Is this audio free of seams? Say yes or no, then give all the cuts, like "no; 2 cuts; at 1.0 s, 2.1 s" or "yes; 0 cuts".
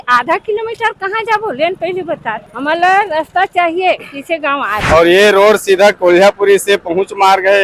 no; 2 cuts; at 2.5 s, 4.8 s